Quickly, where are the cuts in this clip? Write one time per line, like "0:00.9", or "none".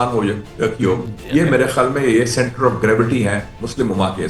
none